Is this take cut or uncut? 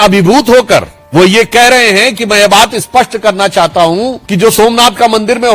cut